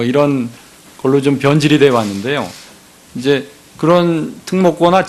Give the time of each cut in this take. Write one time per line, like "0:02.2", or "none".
0:01.8